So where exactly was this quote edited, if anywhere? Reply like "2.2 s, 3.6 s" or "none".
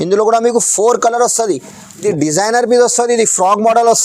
2.0 s